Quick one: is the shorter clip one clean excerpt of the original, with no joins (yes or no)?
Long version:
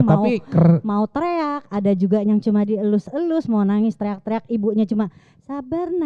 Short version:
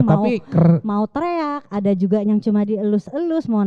yes